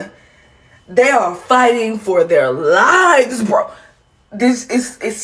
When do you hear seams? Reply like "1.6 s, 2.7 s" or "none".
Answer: none